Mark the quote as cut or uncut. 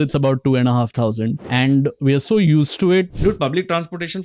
cut